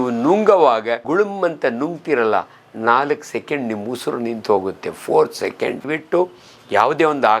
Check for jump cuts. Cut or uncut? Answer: cut